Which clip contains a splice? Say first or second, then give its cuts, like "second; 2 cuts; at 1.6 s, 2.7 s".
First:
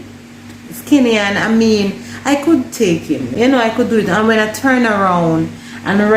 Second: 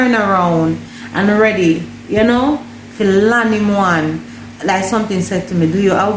first; 1 cut; at 3.3 s